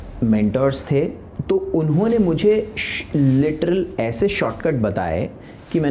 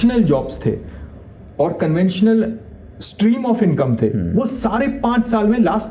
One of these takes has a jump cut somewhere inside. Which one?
first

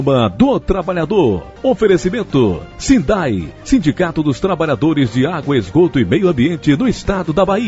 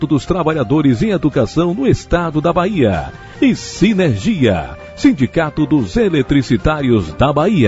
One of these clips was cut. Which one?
first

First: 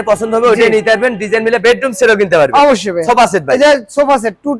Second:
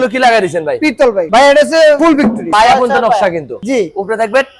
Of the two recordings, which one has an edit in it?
second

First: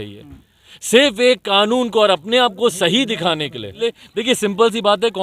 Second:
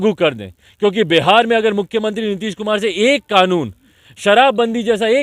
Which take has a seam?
first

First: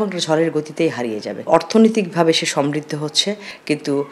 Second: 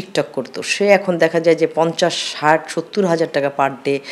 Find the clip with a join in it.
first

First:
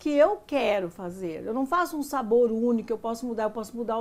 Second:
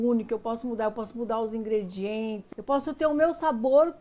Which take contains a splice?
second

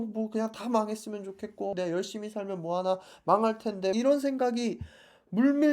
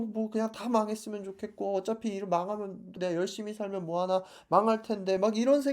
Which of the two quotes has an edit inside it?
first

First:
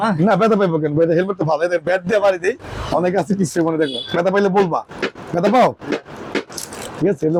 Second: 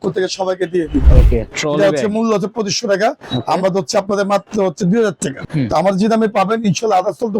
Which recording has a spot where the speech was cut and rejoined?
second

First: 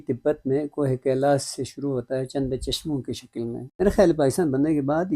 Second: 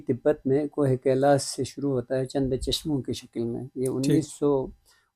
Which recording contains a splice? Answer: first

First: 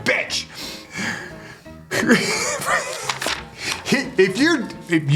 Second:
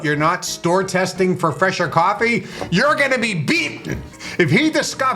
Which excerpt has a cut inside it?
second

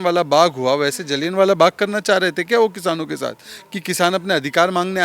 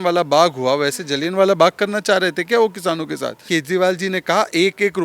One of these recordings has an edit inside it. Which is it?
second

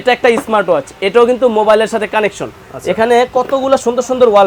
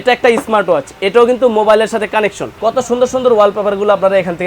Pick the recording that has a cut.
second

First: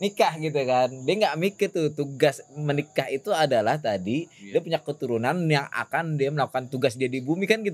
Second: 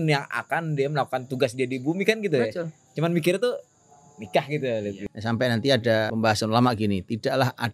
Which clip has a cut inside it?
second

